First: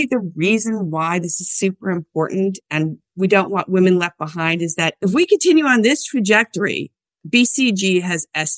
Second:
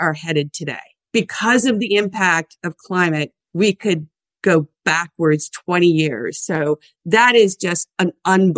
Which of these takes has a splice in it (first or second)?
second